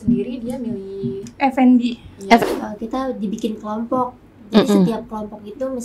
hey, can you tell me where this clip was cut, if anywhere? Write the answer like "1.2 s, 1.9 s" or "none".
2.4 s

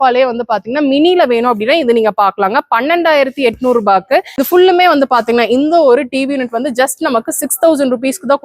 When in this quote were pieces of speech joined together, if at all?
4.3 s

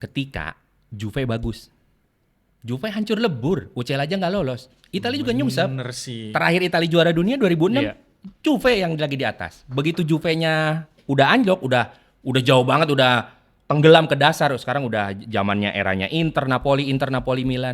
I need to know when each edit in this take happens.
none

